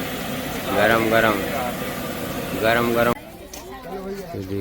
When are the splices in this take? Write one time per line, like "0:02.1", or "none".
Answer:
0:03.1